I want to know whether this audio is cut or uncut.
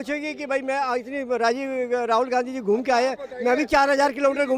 uncut